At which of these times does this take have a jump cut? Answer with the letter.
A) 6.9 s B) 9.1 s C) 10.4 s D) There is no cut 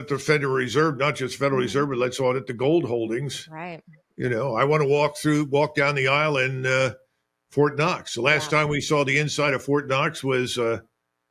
D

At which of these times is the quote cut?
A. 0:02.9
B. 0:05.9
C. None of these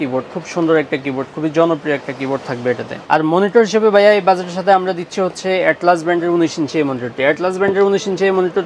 A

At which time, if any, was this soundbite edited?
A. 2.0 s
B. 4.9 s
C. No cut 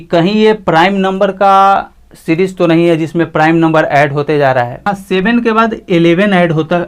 B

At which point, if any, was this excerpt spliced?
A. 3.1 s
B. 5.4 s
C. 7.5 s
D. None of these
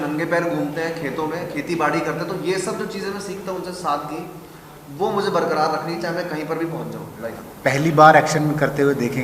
C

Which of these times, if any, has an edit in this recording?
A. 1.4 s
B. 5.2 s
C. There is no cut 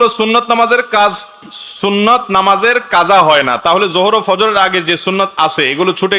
C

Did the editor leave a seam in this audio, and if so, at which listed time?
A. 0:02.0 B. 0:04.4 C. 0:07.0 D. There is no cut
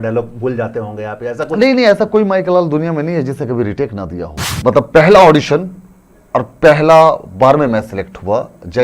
B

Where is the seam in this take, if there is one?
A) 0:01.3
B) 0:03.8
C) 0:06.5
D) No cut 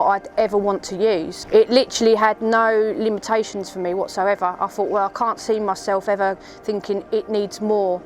A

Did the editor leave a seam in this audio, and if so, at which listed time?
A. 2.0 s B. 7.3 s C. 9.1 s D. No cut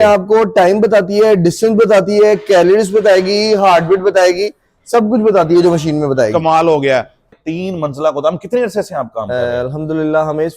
B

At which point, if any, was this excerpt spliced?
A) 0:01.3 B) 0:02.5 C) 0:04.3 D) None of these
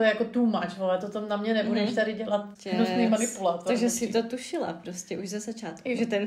B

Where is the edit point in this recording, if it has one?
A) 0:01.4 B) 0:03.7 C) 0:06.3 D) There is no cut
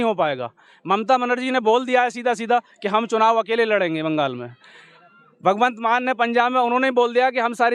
D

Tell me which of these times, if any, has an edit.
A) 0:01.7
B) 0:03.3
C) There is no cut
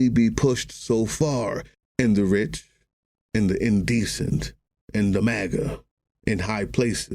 A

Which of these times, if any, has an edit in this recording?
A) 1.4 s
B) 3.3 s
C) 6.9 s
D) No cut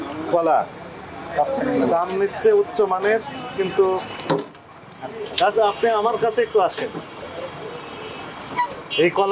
D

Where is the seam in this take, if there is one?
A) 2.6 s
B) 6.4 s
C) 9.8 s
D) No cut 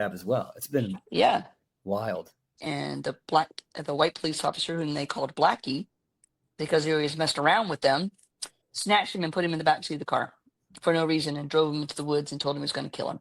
A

